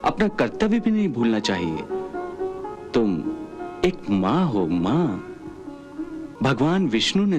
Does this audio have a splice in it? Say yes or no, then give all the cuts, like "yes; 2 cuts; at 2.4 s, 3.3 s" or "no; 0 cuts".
yes; 1 cut; at 6.2 s